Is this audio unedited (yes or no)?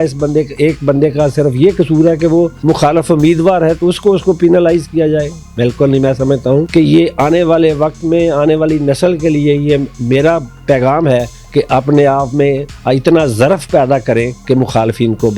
no